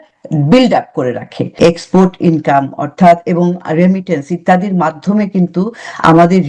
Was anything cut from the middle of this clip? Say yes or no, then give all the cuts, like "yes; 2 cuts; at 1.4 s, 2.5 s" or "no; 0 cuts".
yes; 1 cut; at 1.4 s